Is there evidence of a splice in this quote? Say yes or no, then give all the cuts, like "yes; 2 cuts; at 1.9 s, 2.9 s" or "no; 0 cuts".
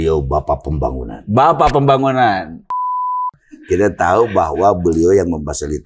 yes; 1 cut; at 3.1 s